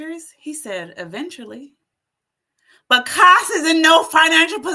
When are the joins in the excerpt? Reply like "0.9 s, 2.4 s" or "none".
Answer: none

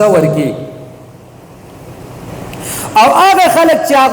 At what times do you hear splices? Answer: 2.3 s

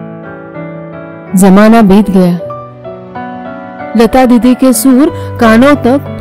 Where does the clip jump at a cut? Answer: none

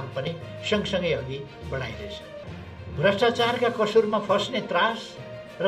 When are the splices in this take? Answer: 2.4 s

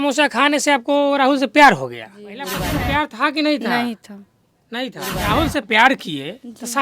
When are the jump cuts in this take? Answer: 2.7 s, 5.1 s

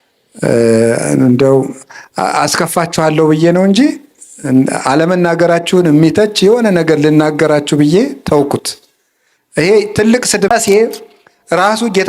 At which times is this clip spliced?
10.5 s

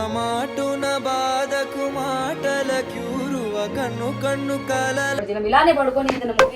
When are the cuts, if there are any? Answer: 5.2 s

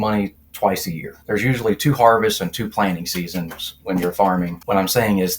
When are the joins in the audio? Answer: 1.2 s, 4.6 s

